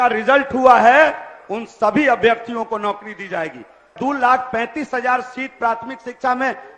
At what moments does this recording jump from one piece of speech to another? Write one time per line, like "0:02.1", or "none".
0:03.9